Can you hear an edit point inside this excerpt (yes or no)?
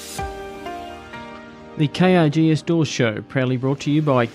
yes